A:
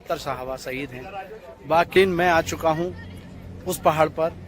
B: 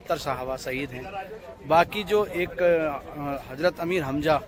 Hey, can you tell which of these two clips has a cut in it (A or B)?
A